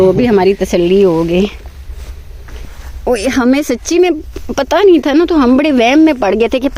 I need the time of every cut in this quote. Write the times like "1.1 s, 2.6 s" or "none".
none